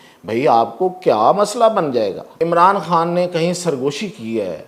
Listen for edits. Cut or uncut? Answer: cut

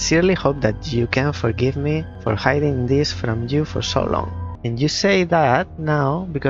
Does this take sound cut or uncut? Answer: uncut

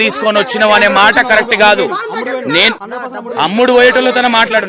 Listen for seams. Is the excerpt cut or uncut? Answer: cut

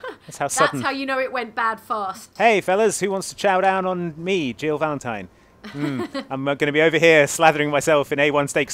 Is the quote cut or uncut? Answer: cut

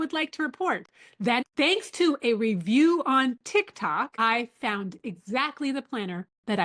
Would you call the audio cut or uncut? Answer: cut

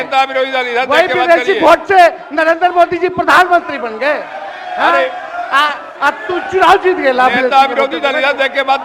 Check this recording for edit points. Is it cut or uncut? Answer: uncut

